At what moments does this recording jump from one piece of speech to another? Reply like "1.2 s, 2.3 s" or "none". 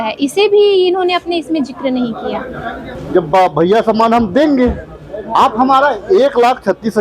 2.9 s, 5.3 s